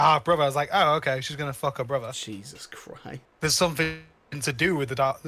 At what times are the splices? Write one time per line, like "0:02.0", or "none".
0:02.2
0:03.2